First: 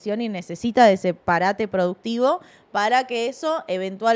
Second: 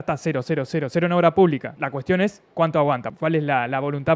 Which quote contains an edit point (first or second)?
second